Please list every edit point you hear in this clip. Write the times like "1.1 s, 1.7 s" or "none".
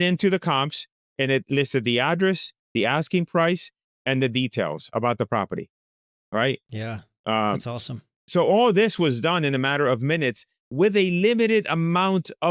none

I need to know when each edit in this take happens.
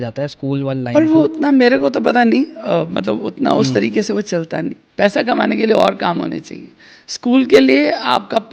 4.8 s

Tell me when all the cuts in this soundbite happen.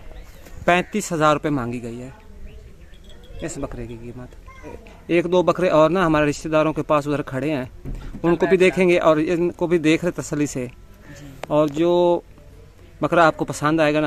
none

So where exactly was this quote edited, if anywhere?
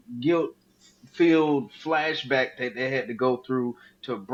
none

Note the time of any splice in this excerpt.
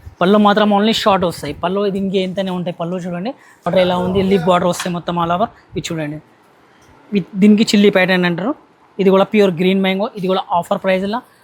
3.7 s

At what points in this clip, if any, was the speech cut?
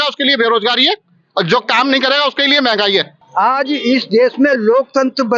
3.1 s

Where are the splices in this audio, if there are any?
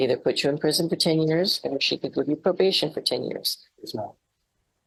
none

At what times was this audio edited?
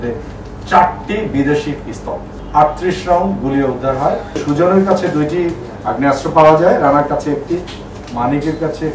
2.3 s, 4.4 s

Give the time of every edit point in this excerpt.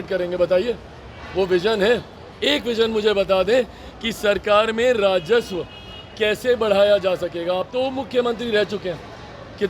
none

